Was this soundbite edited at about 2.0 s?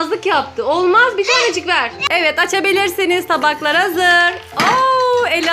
yes; 1 cut; at 2.0 s

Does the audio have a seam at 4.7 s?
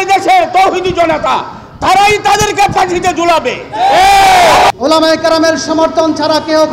yes; 1 cut; at 4.7 s

